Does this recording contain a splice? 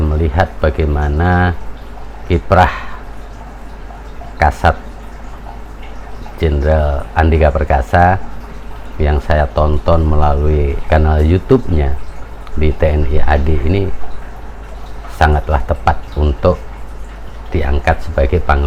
no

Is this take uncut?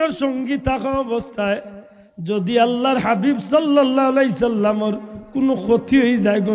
yes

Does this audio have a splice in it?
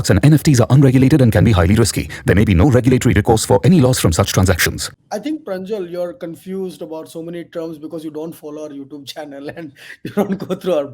yes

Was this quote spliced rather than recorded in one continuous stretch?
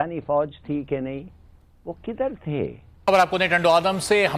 yes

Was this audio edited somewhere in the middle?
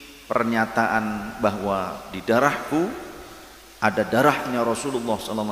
no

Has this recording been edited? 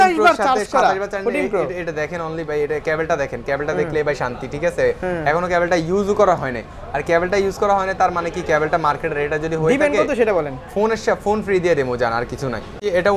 no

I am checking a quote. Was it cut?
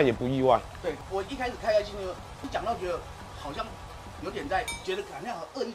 yes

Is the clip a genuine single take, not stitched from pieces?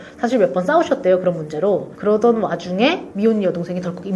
yes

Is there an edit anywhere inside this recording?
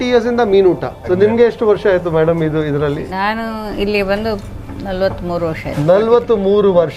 yes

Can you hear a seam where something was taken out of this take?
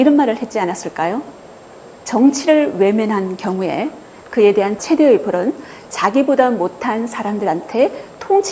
no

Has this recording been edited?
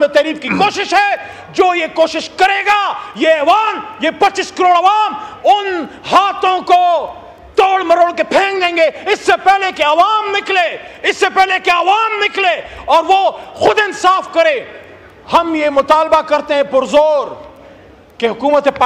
no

